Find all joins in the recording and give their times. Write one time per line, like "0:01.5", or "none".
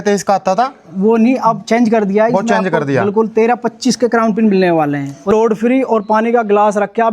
0:05.3